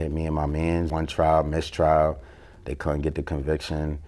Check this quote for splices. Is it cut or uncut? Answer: cut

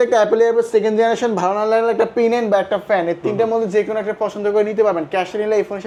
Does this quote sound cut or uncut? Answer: uncut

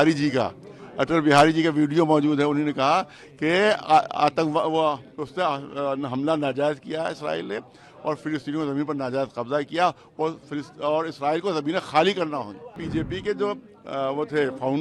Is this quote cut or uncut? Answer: cut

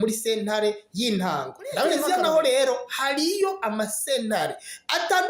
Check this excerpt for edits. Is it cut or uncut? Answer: cut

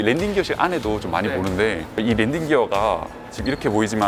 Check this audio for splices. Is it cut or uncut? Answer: uncut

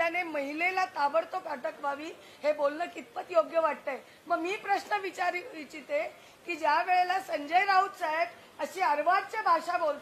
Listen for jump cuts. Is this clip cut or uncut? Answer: uncut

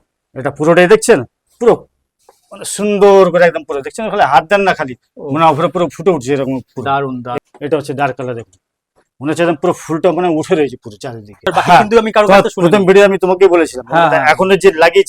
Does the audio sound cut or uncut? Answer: cut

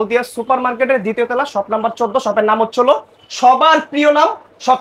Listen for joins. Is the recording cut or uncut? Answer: uncut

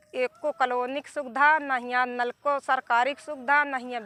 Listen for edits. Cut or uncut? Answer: uncut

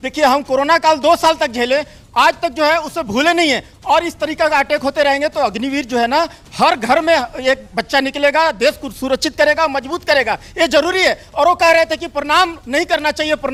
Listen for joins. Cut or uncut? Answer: uncut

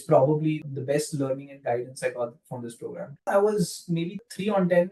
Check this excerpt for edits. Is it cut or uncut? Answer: cut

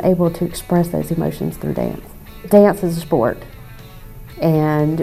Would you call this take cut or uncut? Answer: cut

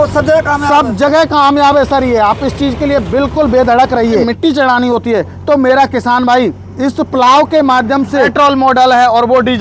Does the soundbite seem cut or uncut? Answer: cut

